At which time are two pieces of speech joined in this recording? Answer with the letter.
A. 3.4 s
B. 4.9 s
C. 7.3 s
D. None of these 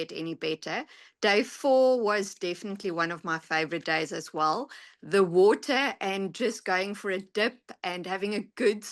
D